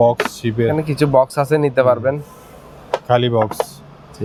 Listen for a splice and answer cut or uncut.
uncut